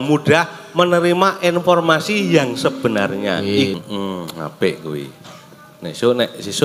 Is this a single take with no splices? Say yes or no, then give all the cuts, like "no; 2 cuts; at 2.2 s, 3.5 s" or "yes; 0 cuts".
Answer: no; 1 cut; at 3.8 s